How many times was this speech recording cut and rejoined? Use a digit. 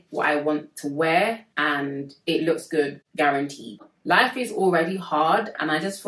1